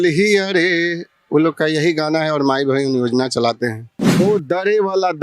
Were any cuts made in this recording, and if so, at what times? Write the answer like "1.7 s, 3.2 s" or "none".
4.2 s